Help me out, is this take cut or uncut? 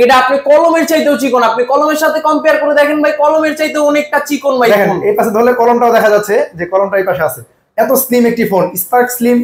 uncut